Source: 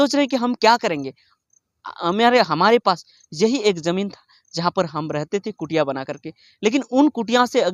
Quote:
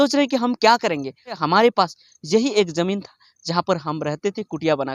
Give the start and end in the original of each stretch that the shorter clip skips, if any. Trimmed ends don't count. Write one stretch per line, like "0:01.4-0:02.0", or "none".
0:01.4-0:02.5